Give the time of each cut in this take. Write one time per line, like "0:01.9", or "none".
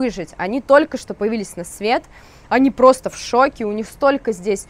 none